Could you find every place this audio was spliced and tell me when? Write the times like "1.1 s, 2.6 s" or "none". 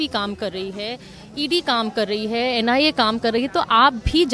none